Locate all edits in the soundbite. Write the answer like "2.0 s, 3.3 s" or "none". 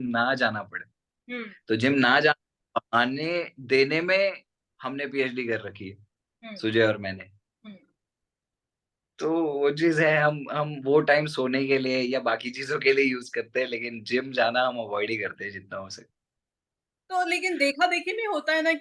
none